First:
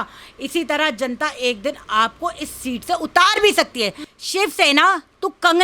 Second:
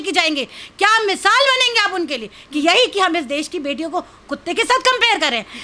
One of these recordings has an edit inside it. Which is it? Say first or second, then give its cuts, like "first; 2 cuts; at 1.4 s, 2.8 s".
first; 1 cut; at 4.0 s